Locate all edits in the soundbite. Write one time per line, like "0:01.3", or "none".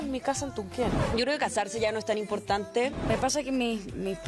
0:01.1
0:03.0